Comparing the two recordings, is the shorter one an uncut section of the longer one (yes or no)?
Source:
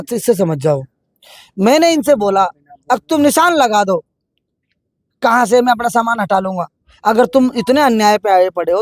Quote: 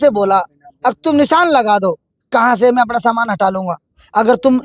no